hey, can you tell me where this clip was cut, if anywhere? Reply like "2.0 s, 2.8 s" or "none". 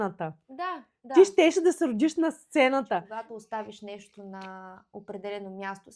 3.1 s